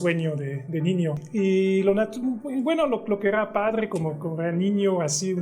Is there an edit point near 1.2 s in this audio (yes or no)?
yes